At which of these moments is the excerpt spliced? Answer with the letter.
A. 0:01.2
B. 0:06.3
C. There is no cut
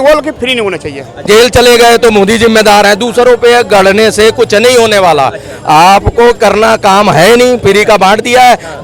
A